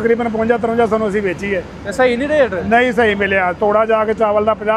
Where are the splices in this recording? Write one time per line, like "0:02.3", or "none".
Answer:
none